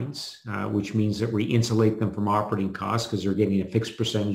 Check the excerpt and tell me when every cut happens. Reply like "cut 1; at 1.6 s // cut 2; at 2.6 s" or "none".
none